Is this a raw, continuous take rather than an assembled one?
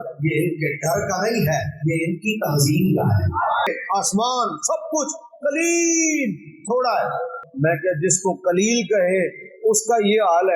no; 2 cuts; at 3.7 s, 7.4 s

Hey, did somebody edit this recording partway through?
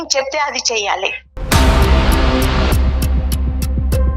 yes; 1 cut; at 1.3 s

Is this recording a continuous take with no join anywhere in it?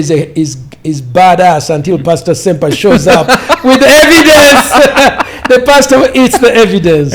yes; 0 cuts

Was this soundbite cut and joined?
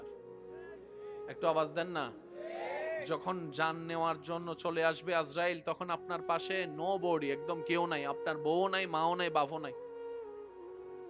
no; 0 cuts

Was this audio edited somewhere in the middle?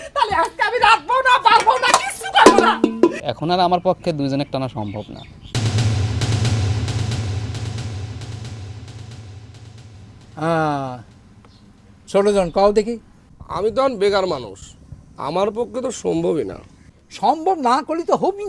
yes; 1 cut; at 3.2 s

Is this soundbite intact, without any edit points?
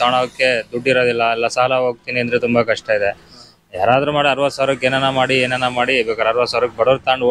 yes; 0 cuts

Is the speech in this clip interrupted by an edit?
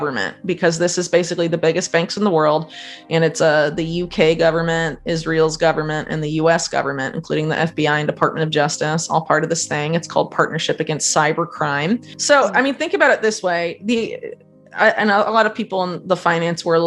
yes; 1 cut; at 12.1 s

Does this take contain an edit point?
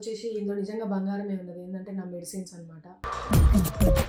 no; 0 cuts

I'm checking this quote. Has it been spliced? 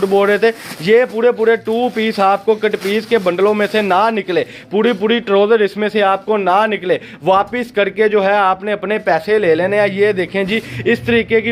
no; 0 cuts

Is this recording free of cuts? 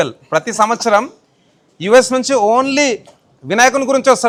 yes; 0 cuts

